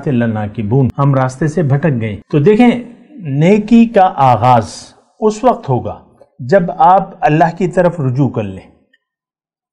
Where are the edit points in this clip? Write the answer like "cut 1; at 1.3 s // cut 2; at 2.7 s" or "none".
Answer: cut 1; at 0.9 s // cut 2; at 2.2 s